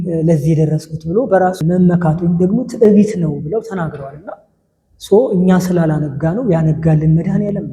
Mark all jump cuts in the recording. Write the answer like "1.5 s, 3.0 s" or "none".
1.6 s